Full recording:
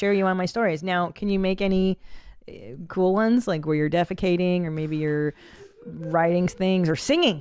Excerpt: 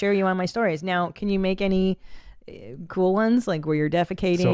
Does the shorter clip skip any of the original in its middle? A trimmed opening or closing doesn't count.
no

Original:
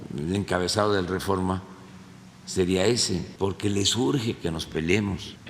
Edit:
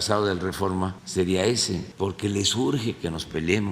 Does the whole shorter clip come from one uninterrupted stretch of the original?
no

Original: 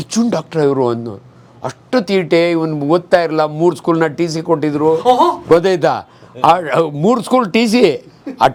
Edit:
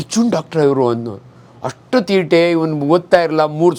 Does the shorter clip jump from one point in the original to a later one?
no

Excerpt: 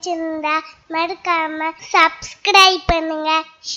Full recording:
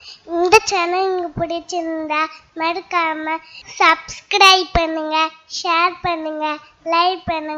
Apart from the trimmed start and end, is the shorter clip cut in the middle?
yes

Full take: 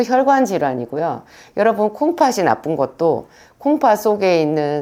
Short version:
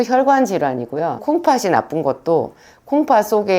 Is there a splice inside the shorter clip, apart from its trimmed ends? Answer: yes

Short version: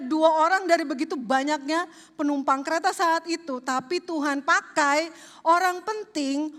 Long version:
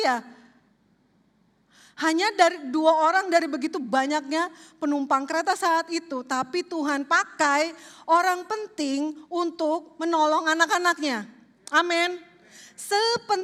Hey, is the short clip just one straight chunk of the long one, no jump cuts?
yes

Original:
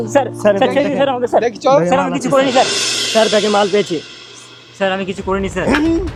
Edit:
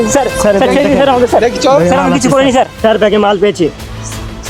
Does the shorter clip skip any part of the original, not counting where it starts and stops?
yes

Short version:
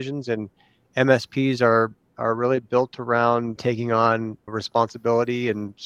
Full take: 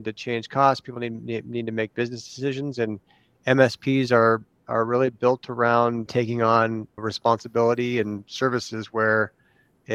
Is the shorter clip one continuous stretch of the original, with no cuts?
yes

